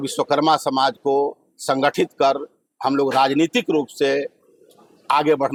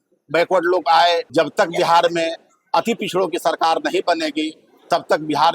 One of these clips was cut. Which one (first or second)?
second